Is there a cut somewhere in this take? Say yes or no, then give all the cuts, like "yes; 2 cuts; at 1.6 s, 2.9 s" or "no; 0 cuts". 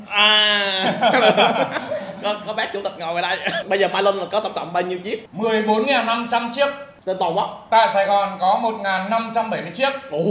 yes; 3 cuts; at 3.6 s, 5.2 s, 6.9 s